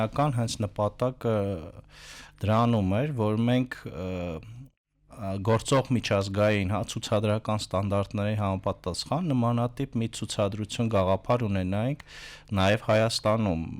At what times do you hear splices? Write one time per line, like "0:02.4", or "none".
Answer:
none